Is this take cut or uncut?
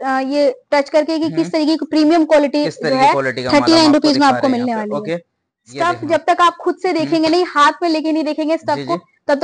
uncut